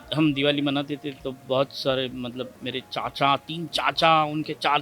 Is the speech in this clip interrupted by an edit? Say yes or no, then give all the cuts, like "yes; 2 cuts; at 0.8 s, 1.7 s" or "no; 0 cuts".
no; 0 cuts